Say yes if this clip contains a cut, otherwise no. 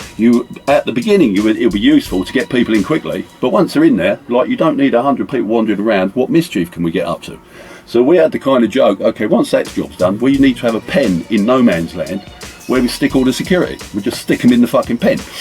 no